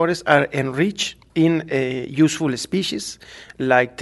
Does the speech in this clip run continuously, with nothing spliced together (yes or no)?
yes